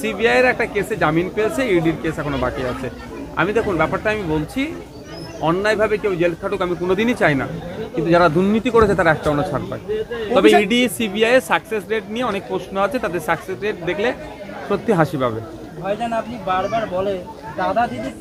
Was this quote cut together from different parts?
no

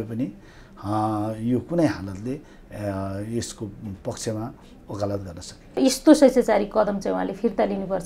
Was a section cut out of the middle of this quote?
yes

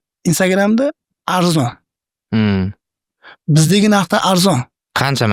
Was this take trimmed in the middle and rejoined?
no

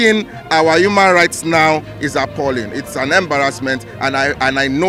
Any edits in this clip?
no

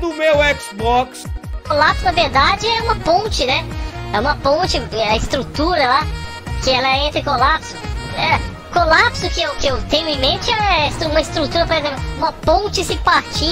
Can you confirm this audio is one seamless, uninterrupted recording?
no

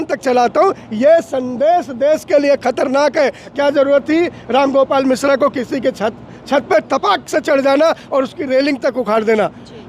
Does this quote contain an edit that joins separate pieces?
yes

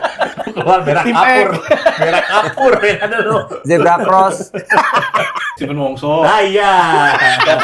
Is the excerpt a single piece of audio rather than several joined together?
no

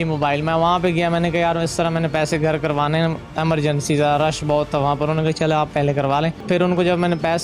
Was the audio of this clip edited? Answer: yes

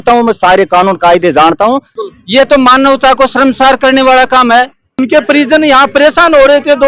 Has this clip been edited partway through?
yes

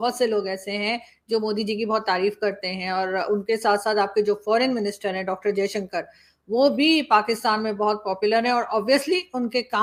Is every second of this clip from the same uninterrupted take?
yes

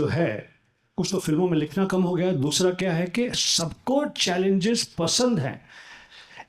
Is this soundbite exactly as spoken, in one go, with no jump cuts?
yes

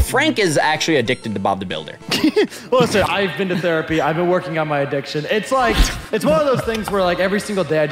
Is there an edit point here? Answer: yes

